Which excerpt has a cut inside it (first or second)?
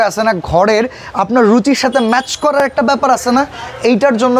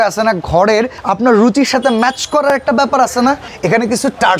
second